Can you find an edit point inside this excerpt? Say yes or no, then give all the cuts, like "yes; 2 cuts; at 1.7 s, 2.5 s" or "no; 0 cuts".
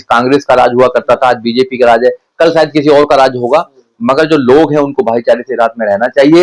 no; 0 cuts